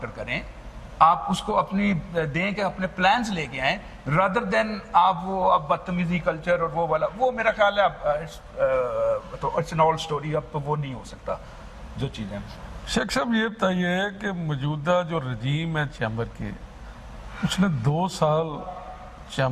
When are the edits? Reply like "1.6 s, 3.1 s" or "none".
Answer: none